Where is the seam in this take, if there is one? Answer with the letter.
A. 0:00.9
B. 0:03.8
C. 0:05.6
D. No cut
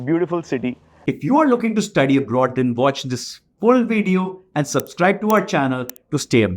A